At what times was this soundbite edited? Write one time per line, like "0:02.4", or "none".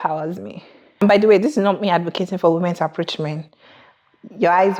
0:01.0